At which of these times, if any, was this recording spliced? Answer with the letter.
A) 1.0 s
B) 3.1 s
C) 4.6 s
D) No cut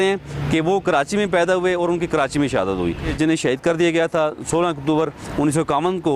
B